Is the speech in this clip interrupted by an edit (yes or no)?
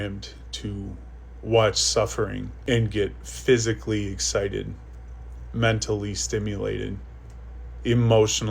yes